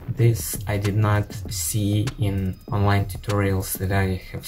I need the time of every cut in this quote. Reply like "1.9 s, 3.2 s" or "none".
2.6 s